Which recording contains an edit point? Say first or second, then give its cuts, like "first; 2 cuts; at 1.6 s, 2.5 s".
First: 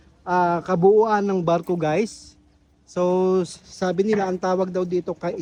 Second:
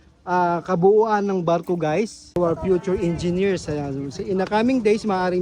second; 1 cut; at 2.2 s